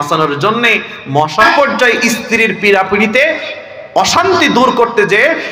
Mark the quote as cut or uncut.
cut